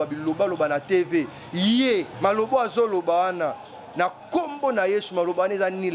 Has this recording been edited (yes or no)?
yes